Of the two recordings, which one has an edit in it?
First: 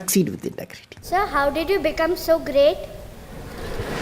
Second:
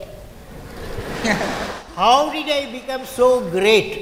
first; 1 cut; at 1.0 s

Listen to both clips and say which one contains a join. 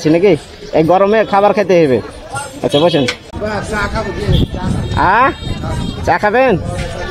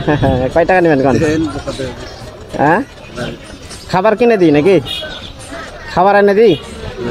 first; 1 cut; at 3.2 s

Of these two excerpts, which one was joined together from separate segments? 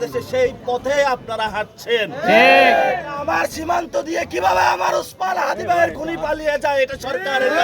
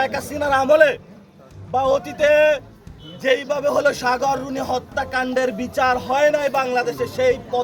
first; 1 cut; at 3.2 s

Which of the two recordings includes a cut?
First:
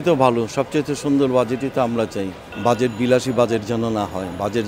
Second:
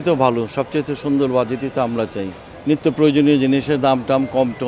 first; 1 cut; at 2.4 s

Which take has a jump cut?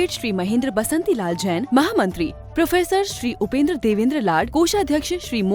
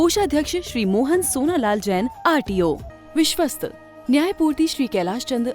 second; 1 cut; at 2.9 s

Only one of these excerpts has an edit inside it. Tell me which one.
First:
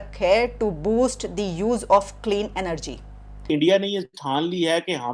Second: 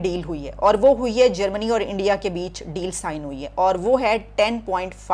first; 1 cut; at 3.3 s

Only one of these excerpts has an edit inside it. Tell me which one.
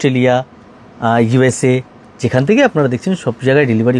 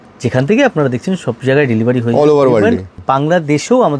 second; 1 cut; at 2.9 s

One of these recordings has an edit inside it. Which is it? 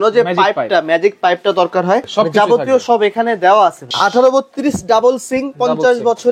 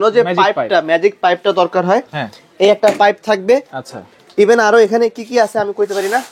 first; 2 cuts; at 2.1 s, 3.9 s

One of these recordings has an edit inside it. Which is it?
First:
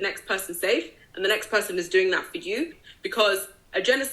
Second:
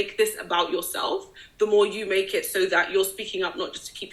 first; 1 cut; at 2.8 s

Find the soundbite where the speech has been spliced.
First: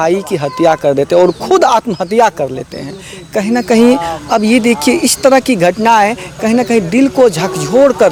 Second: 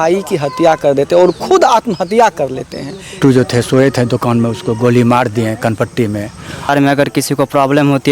second; 2 cuts; at 3.2 s, 6.7 s

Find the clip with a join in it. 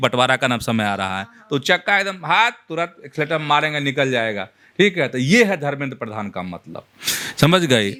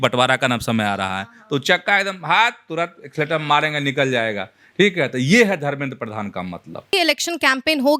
second; 1 cut; at 6.9 s

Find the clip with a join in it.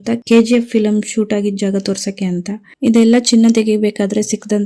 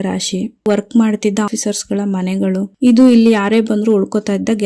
first; 1 cut; at 2.7 s

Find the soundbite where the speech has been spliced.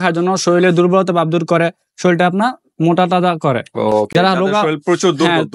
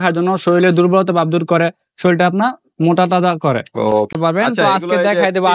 second; 1 cut; at 4.1 s

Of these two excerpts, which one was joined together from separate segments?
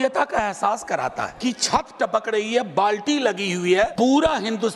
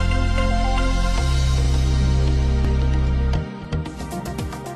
first; 2 cuts; at 1.3 s, 3.9 s

